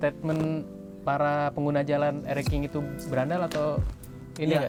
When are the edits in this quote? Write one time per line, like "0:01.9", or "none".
none